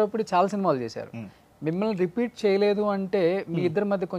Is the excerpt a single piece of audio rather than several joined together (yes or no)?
yes